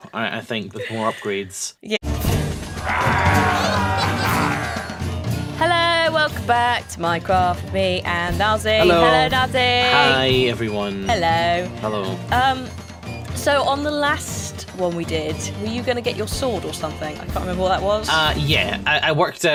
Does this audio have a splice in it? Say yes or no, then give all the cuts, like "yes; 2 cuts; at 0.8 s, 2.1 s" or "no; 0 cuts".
no; 0 cuts